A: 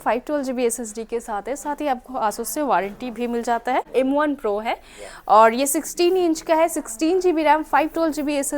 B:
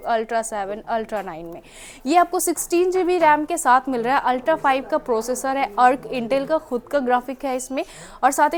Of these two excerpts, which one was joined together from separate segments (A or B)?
A